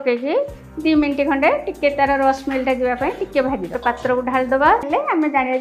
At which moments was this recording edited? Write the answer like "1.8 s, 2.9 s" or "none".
3.8 s, 4.9 s